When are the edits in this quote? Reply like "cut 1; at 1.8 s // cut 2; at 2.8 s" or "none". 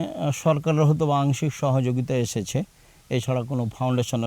none